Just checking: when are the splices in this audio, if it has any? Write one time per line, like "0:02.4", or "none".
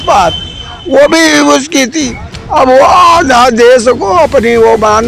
none